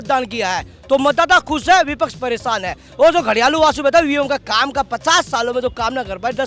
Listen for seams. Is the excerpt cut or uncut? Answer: uncut